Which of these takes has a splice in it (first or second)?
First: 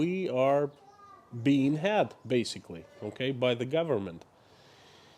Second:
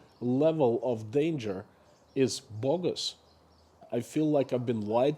second